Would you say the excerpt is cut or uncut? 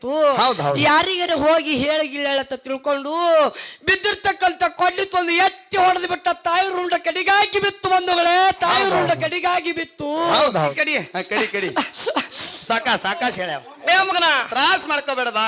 cut